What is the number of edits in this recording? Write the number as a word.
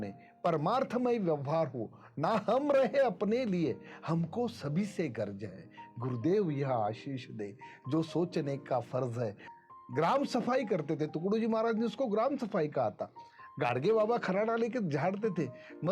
one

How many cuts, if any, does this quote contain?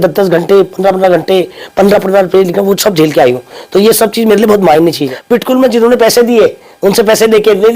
one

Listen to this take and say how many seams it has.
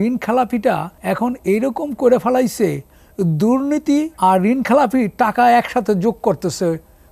two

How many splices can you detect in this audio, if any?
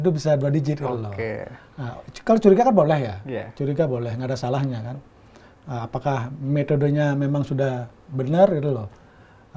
zero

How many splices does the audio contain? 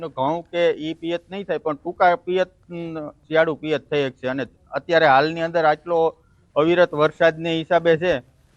one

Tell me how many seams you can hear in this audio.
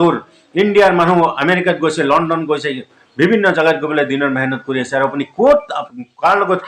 one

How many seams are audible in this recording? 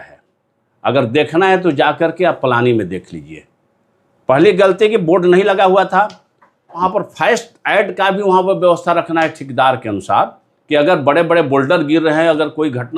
one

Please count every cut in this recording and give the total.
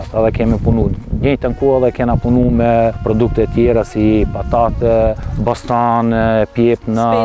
two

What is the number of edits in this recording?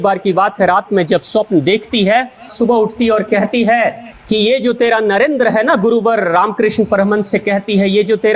one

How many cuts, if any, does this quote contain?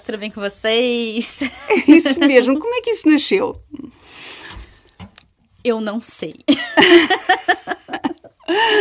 zero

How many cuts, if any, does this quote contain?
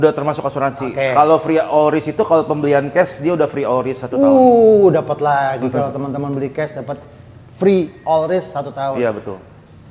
zero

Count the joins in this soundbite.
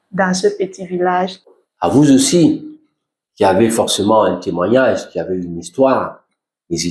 one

